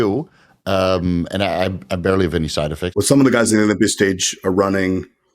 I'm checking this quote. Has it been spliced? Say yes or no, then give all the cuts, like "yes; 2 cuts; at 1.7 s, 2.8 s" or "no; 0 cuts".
yes; 1 cut; at 2.9 s